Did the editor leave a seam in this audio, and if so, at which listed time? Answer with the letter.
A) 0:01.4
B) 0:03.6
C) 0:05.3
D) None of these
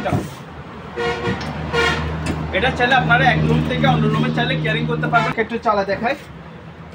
C